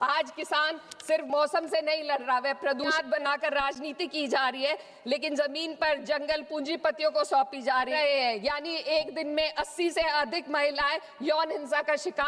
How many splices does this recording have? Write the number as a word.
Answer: two